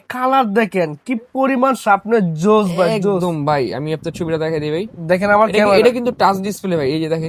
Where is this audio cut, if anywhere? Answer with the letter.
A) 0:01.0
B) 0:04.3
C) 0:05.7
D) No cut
D